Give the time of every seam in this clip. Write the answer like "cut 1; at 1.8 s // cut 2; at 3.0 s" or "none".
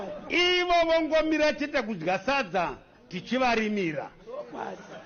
none